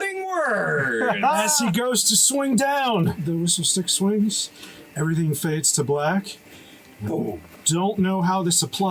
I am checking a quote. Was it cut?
yes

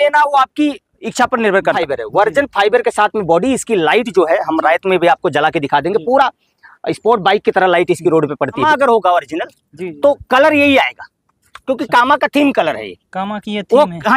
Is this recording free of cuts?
no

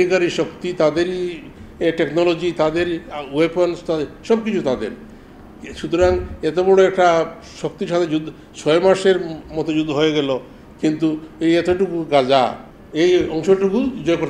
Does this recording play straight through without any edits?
no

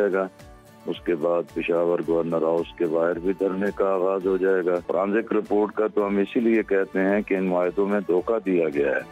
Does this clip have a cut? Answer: yes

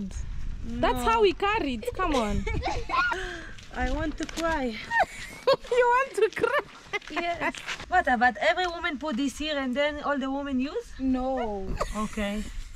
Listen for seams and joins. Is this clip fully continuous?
no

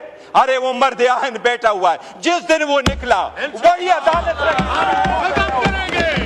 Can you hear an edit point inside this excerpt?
no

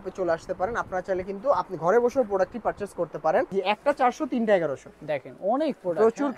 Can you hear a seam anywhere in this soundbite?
yes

